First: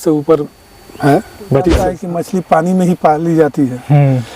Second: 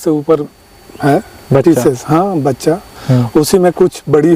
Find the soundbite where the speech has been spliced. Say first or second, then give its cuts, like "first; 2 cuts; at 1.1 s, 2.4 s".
first; 1 cut; at 2.0 s